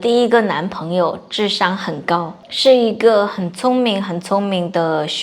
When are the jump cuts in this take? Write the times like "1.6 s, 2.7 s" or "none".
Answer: 2.4 s

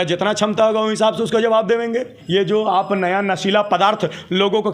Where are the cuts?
2.2 s

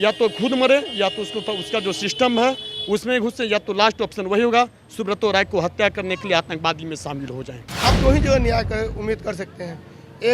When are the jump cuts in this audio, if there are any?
7.7 s

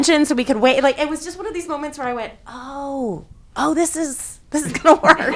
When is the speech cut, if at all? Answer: none

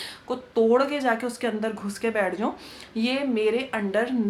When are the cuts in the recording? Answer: none

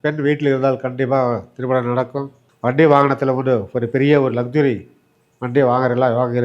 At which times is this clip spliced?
2.4 s

